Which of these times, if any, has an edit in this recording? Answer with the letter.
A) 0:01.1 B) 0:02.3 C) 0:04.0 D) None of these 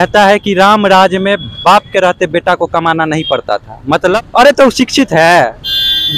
C